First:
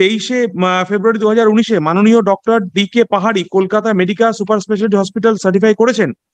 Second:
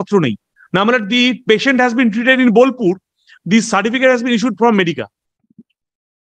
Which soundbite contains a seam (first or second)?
second